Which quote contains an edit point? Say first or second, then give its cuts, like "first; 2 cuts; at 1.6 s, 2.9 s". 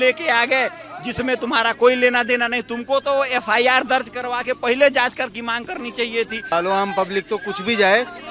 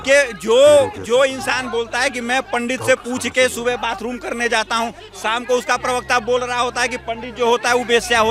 first; 1 cut; at 6.5 s